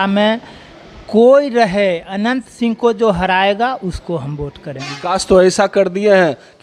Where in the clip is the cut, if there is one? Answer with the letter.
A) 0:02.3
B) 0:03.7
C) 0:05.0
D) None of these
C